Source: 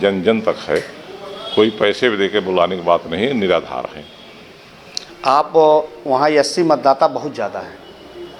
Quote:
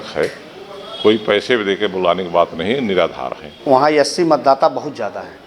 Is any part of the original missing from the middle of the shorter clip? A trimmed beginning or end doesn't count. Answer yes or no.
yes